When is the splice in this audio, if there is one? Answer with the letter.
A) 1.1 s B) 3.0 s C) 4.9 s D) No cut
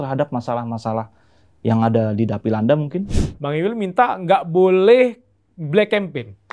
B